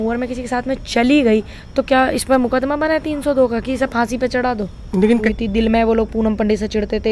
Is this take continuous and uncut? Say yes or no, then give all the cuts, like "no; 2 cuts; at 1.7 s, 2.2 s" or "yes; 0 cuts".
no; 1 cut; at 5.2 s